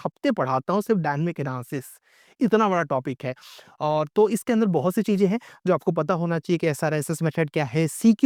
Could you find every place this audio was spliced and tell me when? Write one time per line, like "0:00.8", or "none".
none